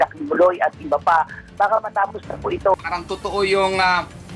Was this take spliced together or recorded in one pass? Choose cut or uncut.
cut